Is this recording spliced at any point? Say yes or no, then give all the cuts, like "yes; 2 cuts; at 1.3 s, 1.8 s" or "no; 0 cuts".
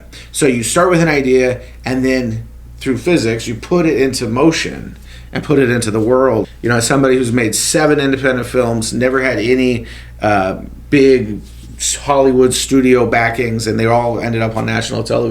yes; 1 cut; at 6.5 s